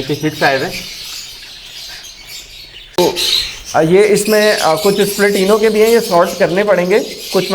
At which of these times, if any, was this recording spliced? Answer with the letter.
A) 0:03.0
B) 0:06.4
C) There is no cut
A